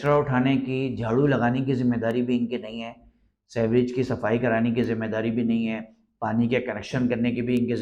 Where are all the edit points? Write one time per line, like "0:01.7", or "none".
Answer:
none